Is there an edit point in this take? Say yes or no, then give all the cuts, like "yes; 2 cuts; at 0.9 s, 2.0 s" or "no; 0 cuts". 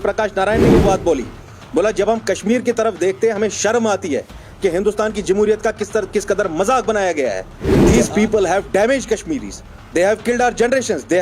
yes; 1 cut; at 7.9 s